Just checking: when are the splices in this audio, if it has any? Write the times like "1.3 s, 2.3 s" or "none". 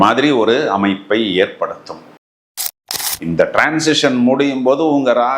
2.6 s